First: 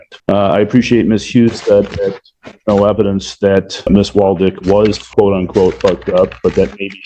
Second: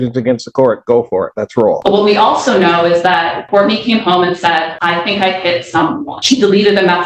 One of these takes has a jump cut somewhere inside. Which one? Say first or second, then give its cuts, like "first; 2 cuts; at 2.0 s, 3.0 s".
second; 4 cuts; at 1.8 s, 3.4 s, 4.7 s, 6.1 s